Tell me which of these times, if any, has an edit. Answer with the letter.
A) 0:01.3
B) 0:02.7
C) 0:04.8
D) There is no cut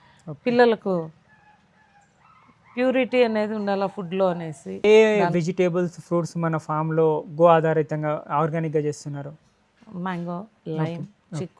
C